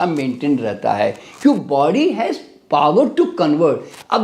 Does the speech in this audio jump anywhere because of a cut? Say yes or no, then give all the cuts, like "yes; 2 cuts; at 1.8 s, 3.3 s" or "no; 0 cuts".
no; 0 cuts